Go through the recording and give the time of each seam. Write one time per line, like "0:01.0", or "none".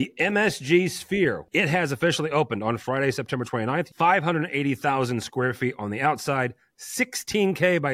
0:01.4
0:03.9